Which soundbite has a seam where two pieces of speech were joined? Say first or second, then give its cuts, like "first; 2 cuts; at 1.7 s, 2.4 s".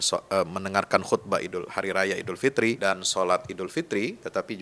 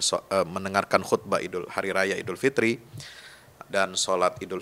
first; 1 cut; at 2.8 s